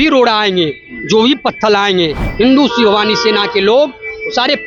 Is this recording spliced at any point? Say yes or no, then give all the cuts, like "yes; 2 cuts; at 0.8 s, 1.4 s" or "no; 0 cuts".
no; 0 cuts